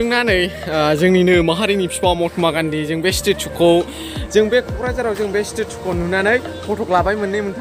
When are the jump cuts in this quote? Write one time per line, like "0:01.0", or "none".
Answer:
none